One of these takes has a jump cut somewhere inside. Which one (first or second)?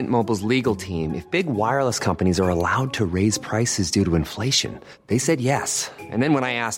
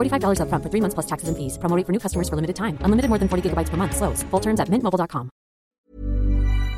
second